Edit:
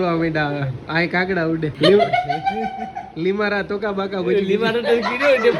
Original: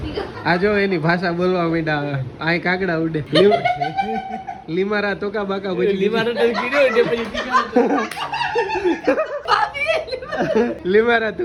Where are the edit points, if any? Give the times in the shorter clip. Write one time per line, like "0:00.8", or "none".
none